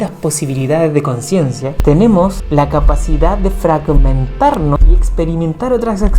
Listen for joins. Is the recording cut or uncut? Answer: cut